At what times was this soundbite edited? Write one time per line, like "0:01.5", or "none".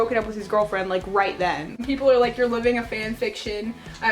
0:01.8